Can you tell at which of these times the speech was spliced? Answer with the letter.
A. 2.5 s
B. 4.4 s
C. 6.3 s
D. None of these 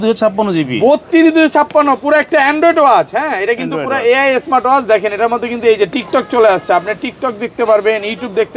D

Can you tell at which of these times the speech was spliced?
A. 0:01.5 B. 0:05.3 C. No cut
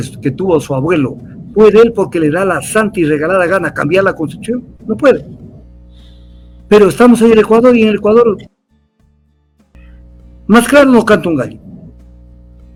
C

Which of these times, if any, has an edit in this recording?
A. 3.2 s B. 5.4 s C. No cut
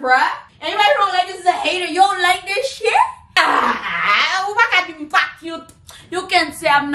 A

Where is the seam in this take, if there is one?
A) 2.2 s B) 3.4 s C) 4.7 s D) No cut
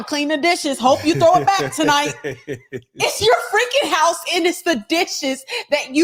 D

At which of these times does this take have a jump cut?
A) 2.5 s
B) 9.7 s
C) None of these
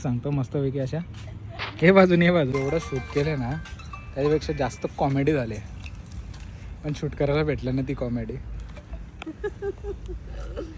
A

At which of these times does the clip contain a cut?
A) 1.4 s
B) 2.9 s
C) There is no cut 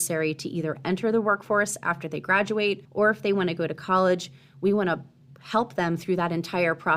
B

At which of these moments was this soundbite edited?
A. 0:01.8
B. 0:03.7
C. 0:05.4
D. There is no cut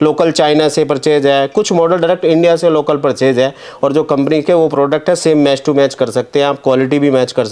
D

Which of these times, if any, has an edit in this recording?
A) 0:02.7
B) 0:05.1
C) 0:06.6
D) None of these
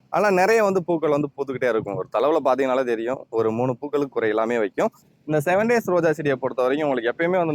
B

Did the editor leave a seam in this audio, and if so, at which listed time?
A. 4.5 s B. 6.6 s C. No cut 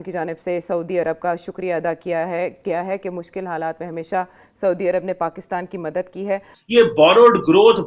B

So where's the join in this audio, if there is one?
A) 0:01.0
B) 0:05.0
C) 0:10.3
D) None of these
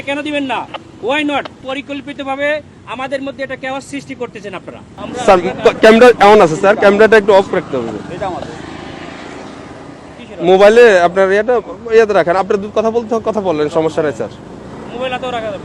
B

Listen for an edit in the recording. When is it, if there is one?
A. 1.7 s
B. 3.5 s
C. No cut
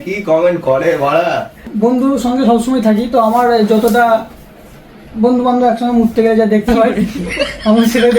A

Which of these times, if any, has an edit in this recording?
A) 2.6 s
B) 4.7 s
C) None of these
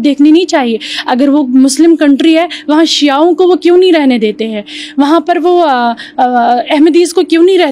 C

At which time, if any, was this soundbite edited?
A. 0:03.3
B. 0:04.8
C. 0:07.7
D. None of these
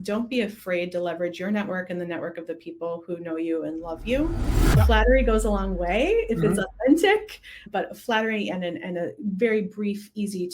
B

